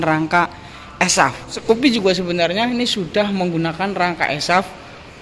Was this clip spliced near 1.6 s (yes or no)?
yes